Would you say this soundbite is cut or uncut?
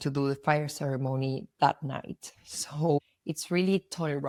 uncut